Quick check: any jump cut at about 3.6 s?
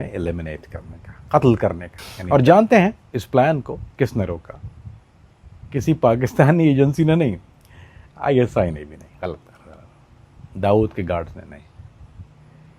no; 1 cut; at 2.2 s

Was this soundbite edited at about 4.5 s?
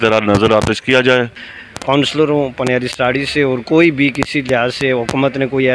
no; 1 cut; at 1.4 s

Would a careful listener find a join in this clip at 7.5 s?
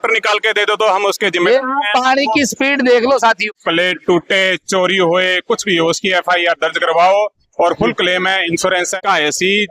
no; 2 cuts; at 3.4 s, 9.0 s

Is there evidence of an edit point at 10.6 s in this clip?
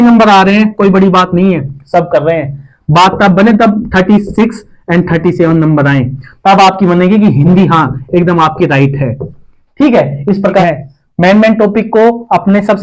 yes; 1 cut; at 10.6 s

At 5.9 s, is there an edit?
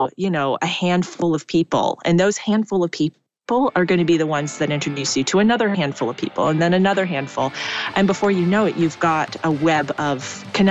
no; 0 cuts

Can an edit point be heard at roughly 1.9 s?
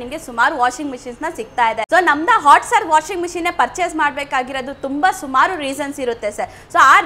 yes; 1 cut; at 1.9 s

